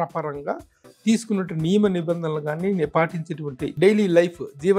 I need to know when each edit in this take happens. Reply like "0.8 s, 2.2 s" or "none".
3.8 s